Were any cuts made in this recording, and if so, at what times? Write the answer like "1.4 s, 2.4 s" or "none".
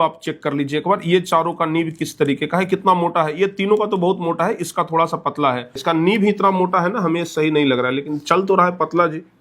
5.8 s